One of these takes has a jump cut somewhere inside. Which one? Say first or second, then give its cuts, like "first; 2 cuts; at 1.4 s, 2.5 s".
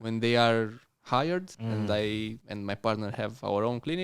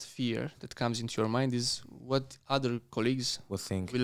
first; 2 cuts; at 1.5 s, 2.4 s